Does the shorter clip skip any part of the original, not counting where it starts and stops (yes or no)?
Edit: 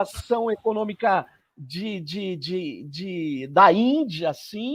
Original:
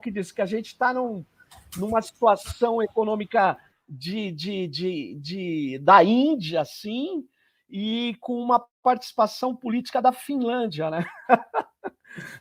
no